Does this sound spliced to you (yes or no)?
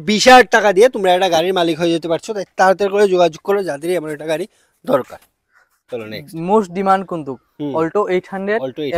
no